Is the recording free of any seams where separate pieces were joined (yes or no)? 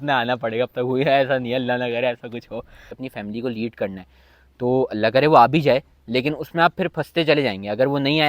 no